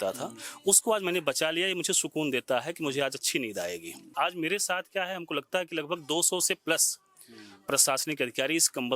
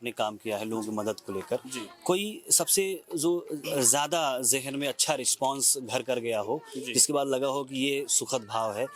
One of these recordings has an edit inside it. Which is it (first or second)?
first